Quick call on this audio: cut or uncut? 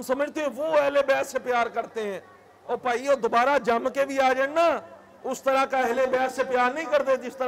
uncut